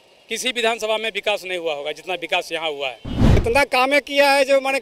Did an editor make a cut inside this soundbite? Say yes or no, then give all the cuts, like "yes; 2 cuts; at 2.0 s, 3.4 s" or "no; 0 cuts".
yes; 1 cut; at 3.4 s